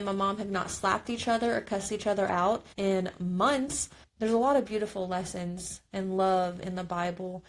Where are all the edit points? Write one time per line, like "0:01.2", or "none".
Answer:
0:02.7
0:04.0